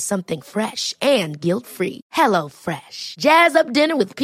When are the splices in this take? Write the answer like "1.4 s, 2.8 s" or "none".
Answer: none